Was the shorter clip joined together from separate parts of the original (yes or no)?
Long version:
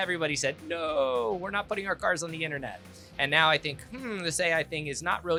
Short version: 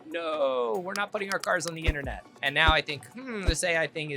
yes